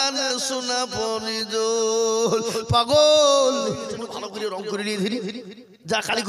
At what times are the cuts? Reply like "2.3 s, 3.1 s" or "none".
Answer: 4.0 s